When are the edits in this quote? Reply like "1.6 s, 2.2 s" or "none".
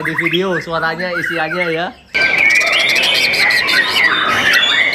2.1 s